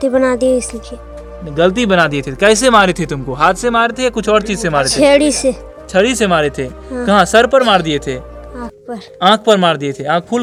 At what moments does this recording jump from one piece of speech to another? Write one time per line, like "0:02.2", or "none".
none